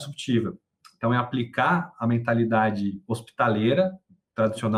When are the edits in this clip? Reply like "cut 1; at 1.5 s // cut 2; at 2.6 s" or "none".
none